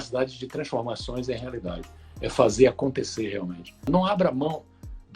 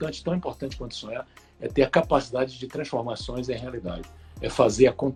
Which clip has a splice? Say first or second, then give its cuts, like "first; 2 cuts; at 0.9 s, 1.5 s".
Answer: first; 1 cut; at 3.9 s